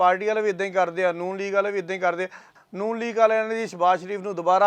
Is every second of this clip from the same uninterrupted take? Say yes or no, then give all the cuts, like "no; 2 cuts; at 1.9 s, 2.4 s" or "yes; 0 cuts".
no; 1 cut; at 2.5 s